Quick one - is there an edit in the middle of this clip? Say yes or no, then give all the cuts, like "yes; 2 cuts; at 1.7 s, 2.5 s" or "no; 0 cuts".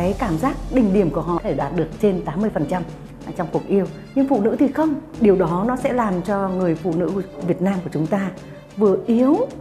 yes; 2 cuts; at 1.4 s, 5.2 s